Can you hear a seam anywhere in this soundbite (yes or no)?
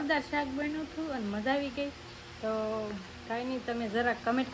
no